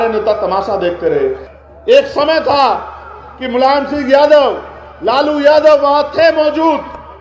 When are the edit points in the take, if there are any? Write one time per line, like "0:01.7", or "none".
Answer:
0:01.5